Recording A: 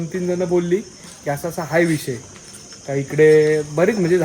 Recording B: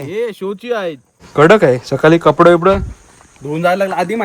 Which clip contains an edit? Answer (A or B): B